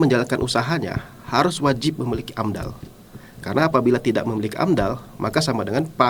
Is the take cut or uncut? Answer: uncut